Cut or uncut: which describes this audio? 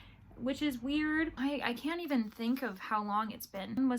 cut